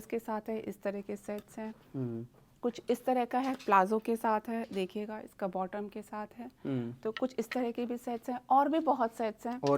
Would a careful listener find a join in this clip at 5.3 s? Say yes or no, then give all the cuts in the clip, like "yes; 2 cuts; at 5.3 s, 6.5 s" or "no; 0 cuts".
no; 0 cuts